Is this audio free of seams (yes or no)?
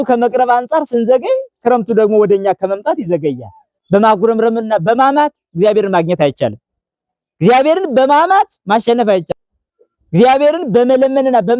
no